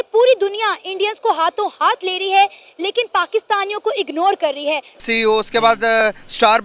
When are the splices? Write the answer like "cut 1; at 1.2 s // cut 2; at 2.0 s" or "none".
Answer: cut 1; at 5.0 s